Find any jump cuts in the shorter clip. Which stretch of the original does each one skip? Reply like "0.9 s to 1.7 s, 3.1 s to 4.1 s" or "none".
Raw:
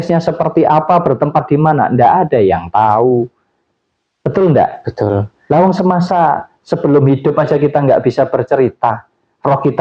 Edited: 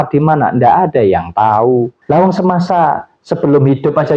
3.3 s to 5.4 s